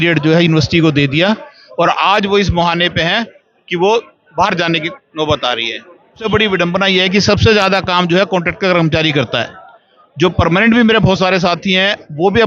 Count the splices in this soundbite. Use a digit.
1